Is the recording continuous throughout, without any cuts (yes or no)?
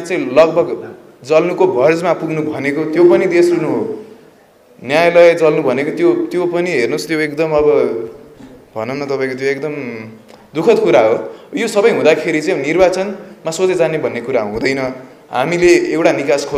yes